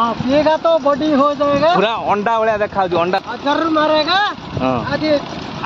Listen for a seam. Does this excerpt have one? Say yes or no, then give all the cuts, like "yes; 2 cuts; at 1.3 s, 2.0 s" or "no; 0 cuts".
yes; 1 cut; at 3.2 s